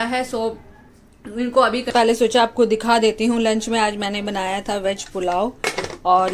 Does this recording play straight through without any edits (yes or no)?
no